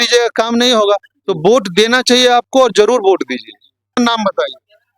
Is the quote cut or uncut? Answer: cut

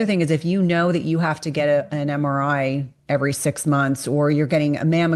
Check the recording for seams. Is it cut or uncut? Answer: uncut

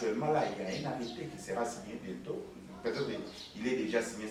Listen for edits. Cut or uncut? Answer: uncut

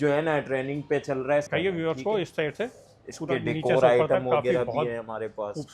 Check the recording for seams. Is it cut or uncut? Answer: cut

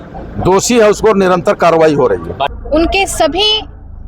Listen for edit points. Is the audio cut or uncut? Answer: cut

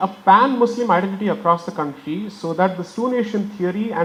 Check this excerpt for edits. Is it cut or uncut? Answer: uncut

